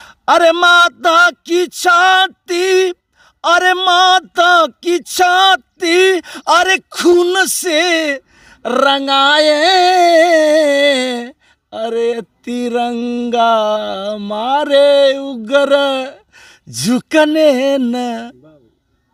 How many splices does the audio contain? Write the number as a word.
zero